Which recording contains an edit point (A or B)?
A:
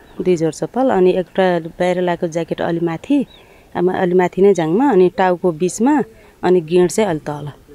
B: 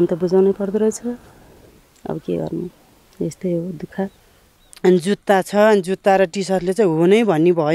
B